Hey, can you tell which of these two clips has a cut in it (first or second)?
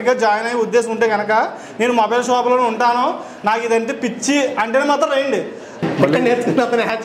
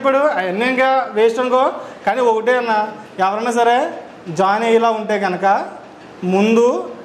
first